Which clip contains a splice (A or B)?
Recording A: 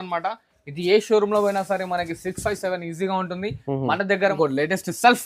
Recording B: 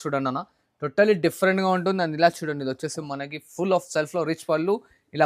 A